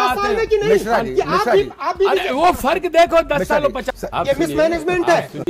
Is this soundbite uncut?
no; 1 cut; at 3.9 s

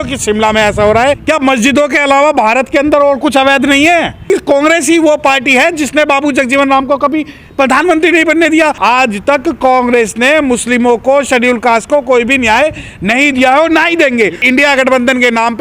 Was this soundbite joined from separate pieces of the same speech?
yes; 4 cuts; at 1.2 s, 4.2 s, 8.8 s, 14.4 s

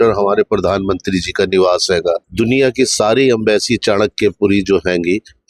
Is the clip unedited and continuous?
no; 1 cut; at 2.3 s

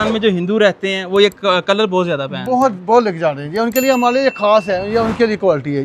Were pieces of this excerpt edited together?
no; 0 cuts

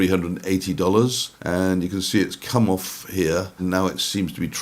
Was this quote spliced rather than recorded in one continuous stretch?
yes; 2 cuts; at 1.3 s, 3.6 s

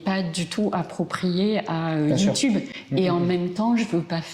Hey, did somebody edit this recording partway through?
no; 0 cuts

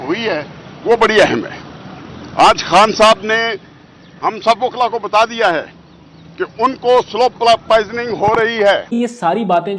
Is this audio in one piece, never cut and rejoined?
no; 1 cut; at 8.9 s

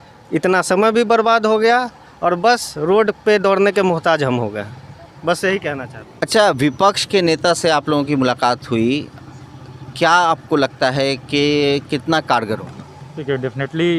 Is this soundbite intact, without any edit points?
yes; 0 cuts

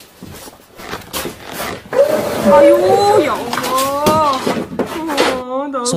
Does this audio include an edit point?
no; 0 cuts

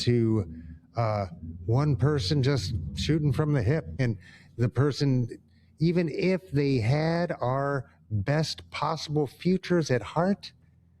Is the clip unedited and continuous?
no; 1 cut; at 4.0 s

